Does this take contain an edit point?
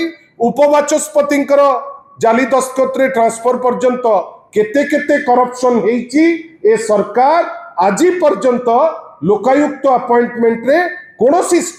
no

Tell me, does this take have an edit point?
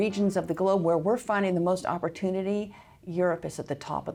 no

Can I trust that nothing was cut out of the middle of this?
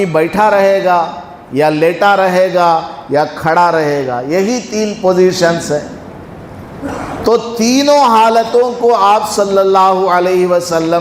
yes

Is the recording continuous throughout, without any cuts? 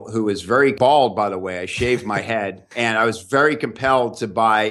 no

